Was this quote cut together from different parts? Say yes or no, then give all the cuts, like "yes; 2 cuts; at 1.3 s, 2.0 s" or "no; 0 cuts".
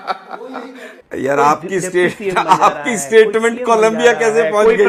no; 0 cuts